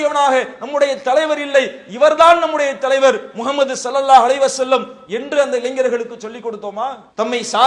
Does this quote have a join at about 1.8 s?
no; 0 cuts

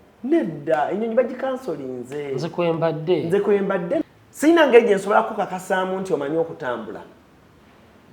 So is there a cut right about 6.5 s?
no; 1 cut; at 4.0 s

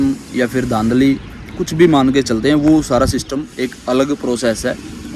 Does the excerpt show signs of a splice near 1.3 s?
no; 0 cuts

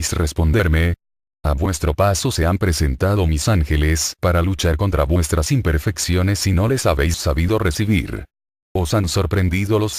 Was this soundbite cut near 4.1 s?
no; 1 cut; at 5.6 s

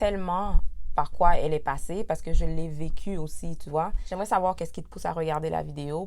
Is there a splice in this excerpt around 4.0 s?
yes; 1 cut; at 4.0 s

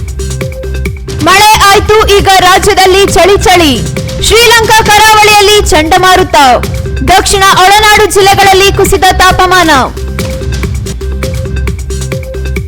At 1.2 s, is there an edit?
yes; 1 cut; at 1.2 s

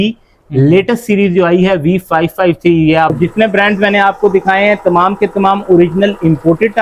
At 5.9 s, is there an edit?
no; 1 cut; at 3.2 s

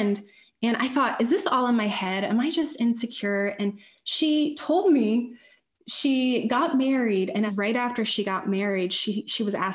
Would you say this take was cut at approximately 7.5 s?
yes; 1 cut; at 7.5 s

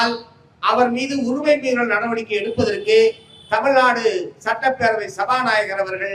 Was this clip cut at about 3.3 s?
no; 0 cuts

